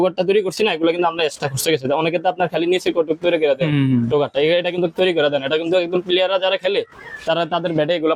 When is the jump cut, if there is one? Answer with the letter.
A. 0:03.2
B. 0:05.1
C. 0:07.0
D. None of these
D